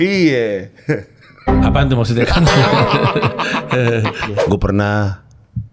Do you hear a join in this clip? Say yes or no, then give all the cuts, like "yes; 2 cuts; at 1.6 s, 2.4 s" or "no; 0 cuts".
yes; 1 cut; at 4.3 s